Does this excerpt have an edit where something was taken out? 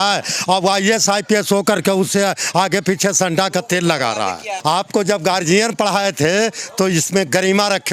yes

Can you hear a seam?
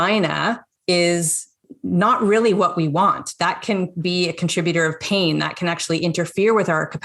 yes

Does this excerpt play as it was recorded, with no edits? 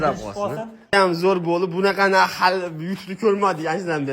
no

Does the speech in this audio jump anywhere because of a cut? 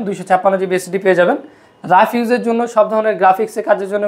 no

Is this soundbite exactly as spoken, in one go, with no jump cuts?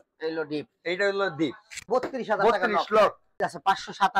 no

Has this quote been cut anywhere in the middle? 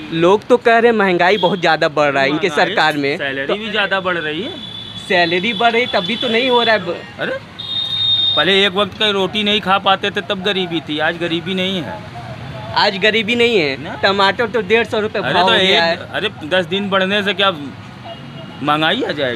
no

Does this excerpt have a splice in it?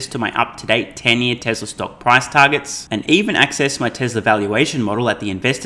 no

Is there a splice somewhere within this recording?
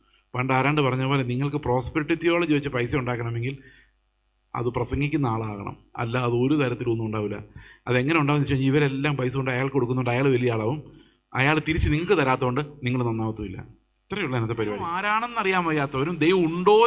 yes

